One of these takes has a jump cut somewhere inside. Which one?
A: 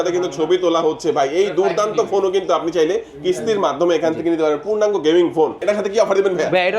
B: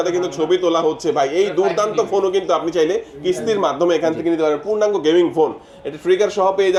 A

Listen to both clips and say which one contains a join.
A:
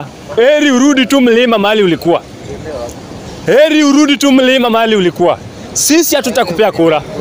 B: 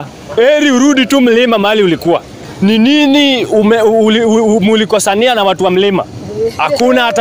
B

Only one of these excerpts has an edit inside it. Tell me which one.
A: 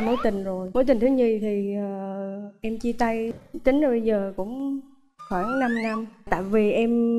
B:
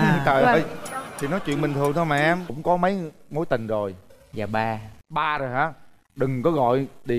B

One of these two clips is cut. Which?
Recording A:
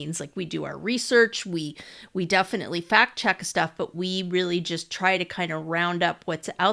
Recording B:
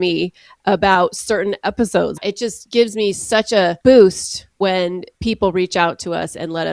B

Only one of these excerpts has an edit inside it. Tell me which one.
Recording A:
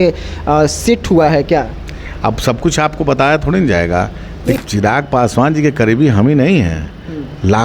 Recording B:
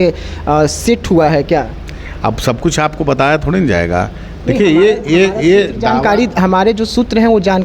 A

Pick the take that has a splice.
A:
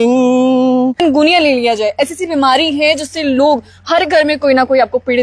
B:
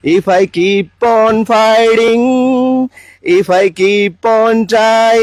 A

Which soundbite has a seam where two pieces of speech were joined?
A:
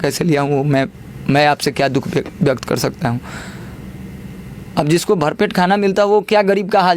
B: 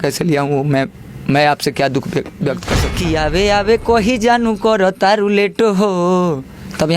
B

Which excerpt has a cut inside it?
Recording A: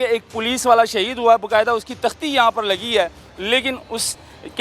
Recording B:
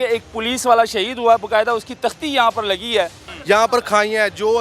B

